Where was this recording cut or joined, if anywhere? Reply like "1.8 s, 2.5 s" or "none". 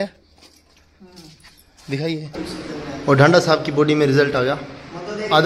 2.4 s